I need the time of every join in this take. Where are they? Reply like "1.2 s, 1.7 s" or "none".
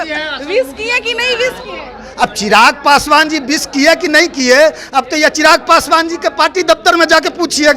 none